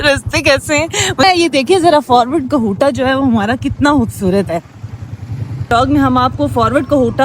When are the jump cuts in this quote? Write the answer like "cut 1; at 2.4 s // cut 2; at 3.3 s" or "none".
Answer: cut 1; at 1.2 s // cut 2; at 5.7 s